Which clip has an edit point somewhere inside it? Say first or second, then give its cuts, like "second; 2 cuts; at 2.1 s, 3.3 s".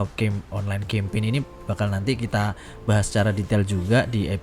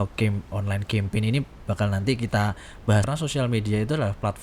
second; 1 cut; at 3.1 s